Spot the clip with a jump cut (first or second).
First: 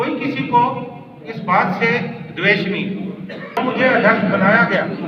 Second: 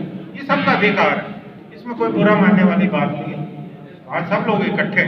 first